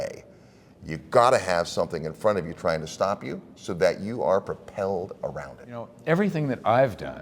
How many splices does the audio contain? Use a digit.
1